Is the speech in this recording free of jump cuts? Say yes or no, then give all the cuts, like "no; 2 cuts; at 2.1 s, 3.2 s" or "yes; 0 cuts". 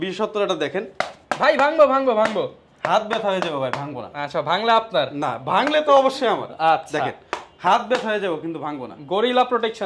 yes; 0 cuts